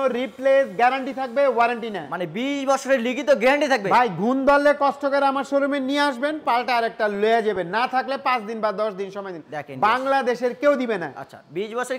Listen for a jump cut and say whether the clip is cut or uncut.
uncut